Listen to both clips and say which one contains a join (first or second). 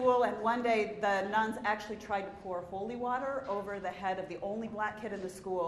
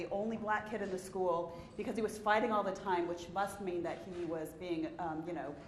first